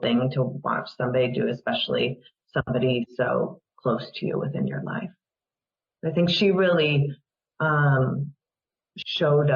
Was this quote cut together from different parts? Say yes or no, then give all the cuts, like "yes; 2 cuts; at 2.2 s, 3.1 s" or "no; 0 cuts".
no; 0 cuts